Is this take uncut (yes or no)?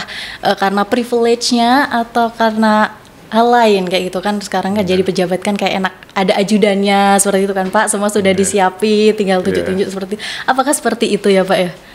yes